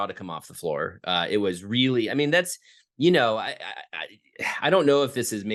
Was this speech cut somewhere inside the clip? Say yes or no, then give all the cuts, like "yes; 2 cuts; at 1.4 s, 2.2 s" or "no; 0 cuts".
no; 0 cuts